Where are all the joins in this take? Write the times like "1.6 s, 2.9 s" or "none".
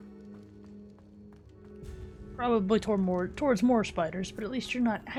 none